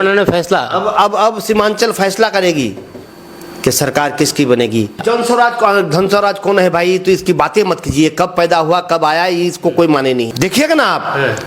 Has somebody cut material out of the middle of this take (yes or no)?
yes